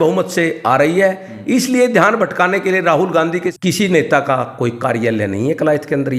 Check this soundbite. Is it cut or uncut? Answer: cut